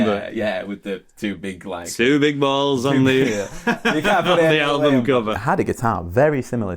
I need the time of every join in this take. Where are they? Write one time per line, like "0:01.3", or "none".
0:05.4